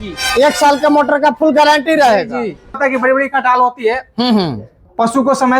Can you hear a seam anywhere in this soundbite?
yes; 1 cut; at 2.7 s

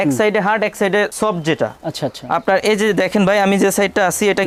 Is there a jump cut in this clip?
no; 0 cuts

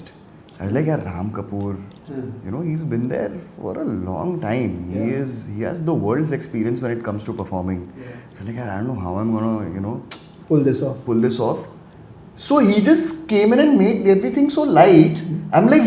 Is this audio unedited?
yes; 0 cuts

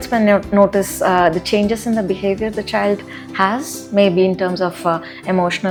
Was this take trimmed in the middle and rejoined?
no; 0 cuts

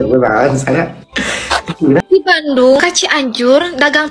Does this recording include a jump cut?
yes; 1 cut; at 2.0 s

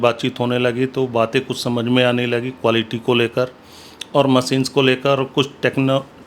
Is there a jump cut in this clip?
no; 0 cuts

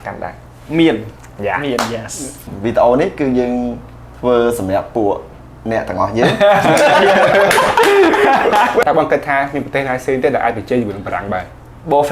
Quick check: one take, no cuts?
no; 2 cuts; at 2.5 s, 8.8 s

